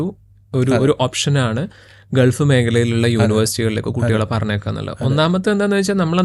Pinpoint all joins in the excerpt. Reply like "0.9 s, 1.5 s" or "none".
none